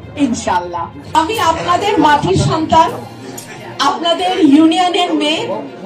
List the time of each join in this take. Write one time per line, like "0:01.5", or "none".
0:01.0